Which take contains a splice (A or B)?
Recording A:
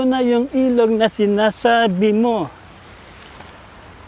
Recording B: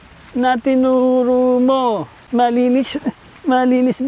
B